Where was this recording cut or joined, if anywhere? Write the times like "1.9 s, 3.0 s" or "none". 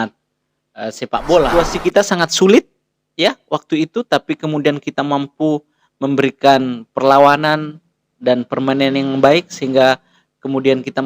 1.5 s